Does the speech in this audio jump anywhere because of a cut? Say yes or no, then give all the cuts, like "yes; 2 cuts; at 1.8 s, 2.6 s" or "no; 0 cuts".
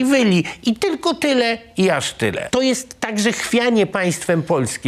yes; 1 cut; at 2.4 s